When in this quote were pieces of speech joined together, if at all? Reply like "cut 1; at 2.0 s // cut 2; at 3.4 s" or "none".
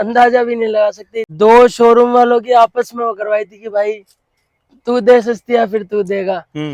cut 1; at 1.2 s